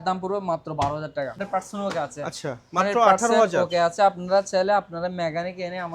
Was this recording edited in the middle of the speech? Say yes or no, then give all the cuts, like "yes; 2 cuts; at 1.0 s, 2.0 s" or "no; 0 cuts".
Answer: yes; 1 cut; at 1.3 s